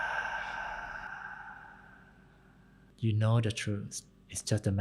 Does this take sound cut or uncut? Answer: cut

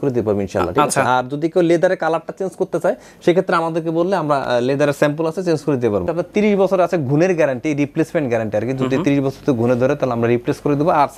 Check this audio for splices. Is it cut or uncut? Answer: cut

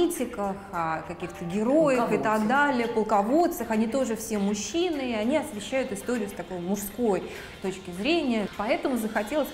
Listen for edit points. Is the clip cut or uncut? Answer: cut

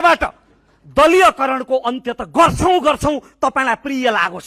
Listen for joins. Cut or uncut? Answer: uncut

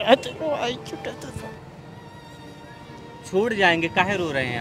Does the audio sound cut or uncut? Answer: uncut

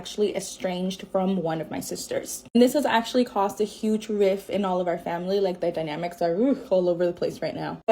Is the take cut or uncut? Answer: uncut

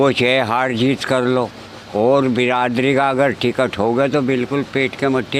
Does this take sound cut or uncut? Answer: uncut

